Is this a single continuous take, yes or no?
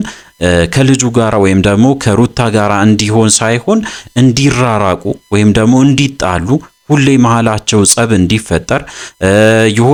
yes